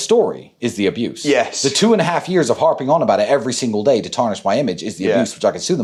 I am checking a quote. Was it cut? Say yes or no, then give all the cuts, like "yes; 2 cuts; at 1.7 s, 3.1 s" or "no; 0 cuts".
no; 0 cuts